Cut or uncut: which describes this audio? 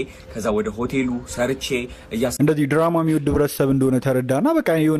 cut